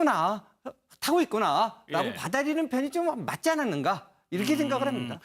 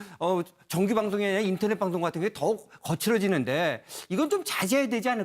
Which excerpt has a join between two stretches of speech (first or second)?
second